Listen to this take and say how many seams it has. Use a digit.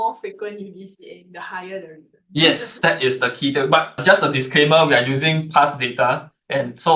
1